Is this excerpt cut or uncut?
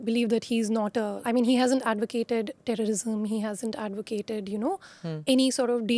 cut